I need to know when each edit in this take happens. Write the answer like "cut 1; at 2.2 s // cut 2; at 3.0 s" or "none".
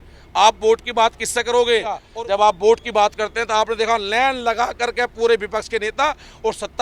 cut 1; at 2.1 s